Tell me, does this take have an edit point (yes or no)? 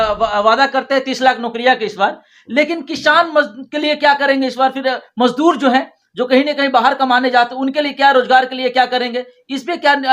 no